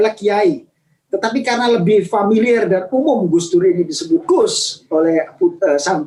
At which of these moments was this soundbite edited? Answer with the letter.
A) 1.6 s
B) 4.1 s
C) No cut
C